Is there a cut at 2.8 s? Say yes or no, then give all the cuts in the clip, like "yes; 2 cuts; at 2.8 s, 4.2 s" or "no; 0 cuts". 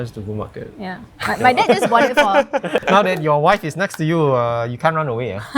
yes; 1 cut; at 2.8 s